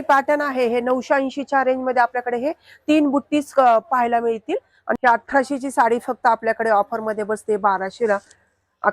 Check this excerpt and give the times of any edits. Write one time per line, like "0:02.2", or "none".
0:04.9